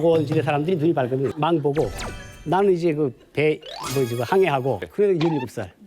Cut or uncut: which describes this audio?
cut